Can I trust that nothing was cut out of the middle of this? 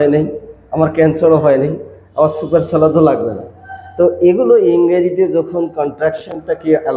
yes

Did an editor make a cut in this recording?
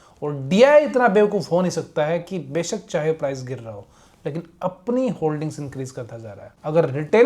no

